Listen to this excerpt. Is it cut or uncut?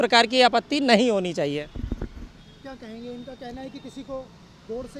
uncut